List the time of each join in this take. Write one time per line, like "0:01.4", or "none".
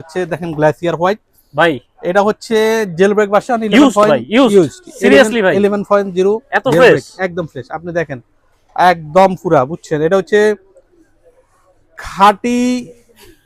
none